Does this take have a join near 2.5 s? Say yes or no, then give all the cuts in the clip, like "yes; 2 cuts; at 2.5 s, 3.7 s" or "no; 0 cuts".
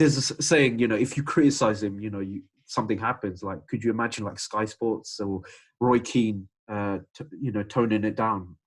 no; 0 cuts